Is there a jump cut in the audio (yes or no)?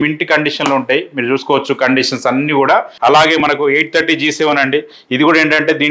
yes